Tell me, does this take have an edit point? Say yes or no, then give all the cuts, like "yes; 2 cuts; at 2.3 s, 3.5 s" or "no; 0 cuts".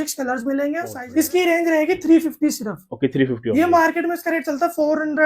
yes; 1 cut; at 0.9 s